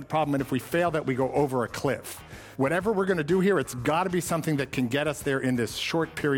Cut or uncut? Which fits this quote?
cut